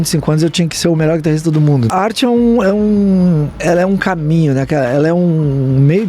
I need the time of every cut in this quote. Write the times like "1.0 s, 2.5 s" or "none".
1.9 s, 3.5 s